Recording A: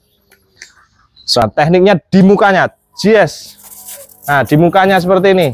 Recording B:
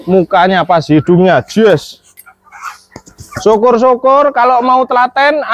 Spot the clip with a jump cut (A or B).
A